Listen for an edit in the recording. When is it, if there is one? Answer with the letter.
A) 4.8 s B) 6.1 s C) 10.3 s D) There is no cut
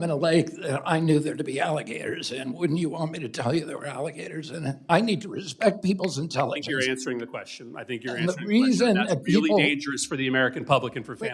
A